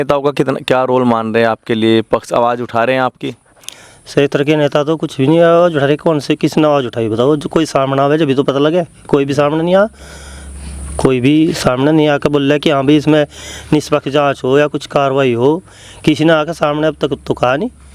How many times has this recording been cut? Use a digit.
0